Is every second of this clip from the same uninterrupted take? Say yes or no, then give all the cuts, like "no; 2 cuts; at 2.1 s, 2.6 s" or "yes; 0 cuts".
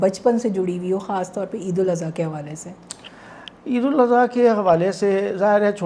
yes; 0 cuts